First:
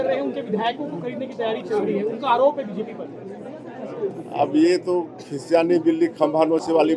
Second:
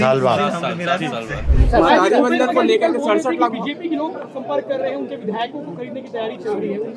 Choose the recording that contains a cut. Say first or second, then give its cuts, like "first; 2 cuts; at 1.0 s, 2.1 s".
second; 1 cut; at 1.4 s